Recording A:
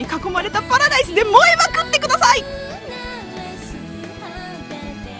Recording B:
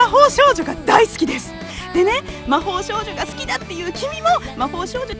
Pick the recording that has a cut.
A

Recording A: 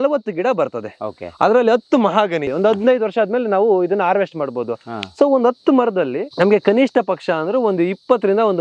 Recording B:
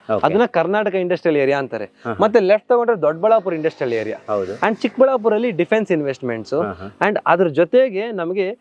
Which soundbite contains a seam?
A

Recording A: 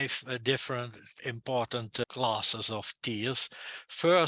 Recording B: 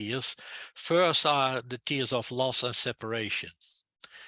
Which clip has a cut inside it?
A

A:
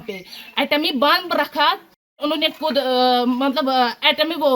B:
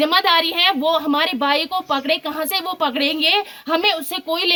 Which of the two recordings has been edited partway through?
A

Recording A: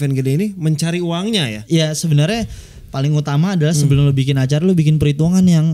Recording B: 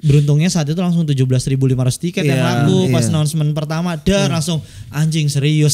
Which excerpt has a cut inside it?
A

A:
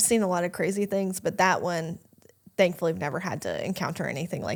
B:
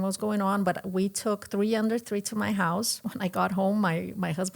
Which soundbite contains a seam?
B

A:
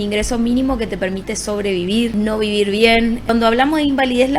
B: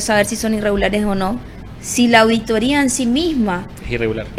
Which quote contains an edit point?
A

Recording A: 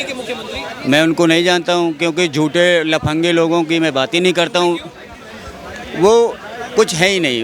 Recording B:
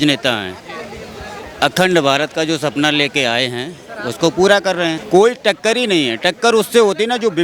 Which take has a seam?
B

